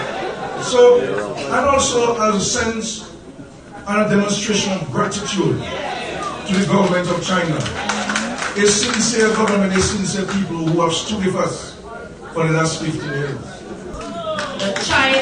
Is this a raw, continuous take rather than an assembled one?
no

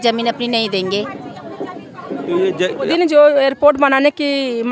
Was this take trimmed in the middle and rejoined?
yes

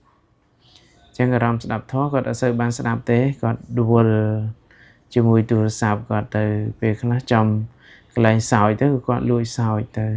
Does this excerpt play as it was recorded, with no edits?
yes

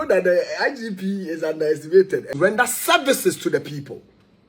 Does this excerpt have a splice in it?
yes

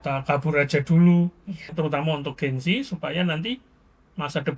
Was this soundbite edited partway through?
yes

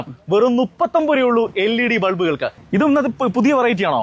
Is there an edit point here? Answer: yes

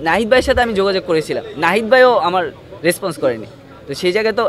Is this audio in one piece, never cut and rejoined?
yes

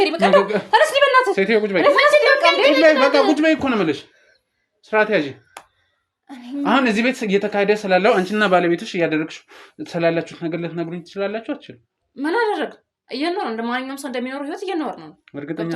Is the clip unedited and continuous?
yes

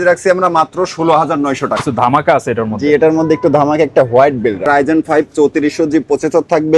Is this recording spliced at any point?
yes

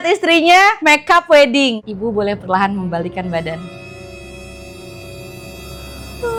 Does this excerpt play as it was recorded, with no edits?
yes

